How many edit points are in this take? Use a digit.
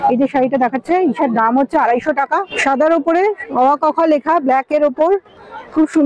1